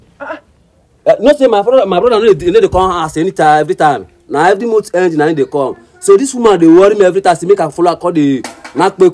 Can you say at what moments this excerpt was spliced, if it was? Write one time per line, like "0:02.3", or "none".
none